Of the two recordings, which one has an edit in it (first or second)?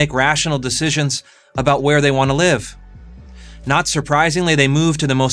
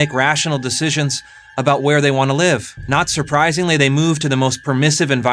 second